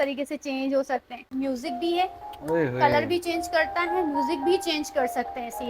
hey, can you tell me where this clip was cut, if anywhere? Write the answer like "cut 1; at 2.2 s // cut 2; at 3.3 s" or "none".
cut 1; at 1.3 s